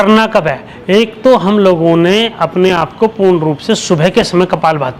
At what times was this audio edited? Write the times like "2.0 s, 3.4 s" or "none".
none